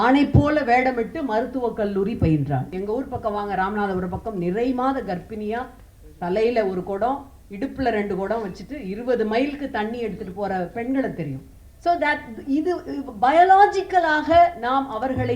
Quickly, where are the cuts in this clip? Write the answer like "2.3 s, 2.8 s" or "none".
2.7 s